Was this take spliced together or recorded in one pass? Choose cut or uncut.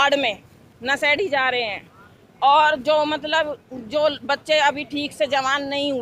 uncut